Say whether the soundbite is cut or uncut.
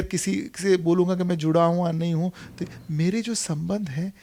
uncut